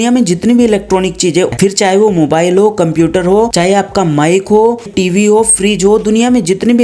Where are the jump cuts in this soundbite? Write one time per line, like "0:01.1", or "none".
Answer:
0:01.5
0:03.5
0:04.9